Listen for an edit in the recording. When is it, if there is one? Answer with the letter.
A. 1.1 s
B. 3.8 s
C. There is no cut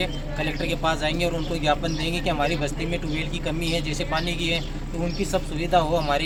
C